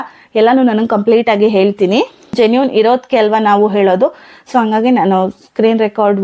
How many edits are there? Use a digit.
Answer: 1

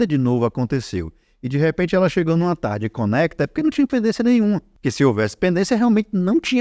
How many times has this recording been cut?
1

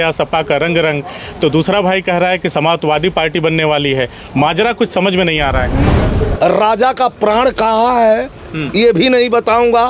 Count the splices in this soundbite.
1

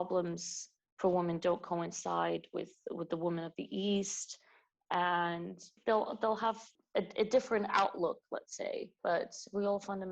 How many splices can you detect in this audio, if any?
3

